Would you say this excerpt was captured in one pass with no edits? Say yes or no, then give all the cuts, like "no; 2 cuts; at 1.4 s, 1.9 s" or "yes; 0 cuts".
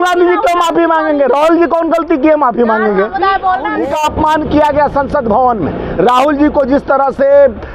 no; 1 cut; at 3.8 s